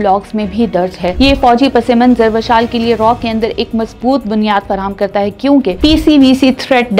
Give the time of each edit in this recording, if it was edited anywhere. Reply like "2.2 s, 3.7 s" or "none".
5.8 s